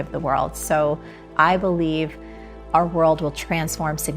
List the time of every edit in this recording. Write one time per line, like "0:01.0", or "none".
0:01.2